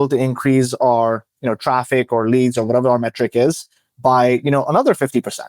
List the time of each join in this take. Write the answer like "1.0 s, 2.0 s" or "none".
none